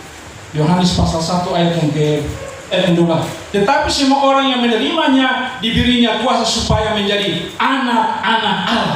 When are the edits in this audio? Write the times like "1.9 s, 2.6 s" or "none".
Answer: 2.7 s